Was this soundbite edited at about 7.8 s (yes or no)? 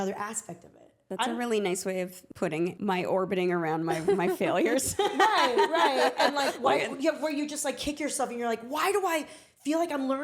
no